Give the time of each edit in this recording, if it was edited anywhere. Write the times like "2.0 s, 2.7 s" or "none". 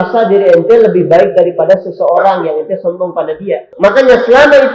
3.6 s